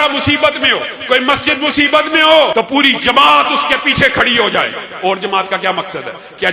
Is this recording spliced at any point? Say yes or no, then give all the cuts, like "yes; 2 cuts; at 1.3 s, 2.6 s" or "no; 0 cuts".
yes; 1 cut; at 2.5 s